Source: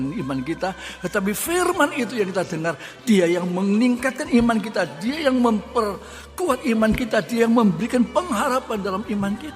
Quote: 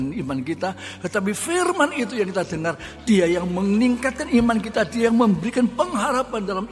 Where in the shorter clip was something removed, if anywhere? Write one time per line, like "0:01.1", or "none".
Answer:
0:04.7